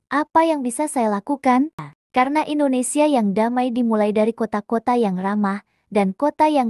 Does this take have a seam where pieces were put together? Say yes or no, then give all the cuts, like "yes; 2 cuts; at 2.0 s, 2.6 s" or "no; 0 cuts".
yes; 1 cut; at 1.8 s